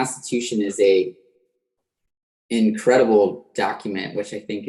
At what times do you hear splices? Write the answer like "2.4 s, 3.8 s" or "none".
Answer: none